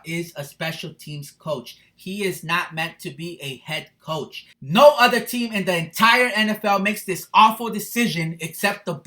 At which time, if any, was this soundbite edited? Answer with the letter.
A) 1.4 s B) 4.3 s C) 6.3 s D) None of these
B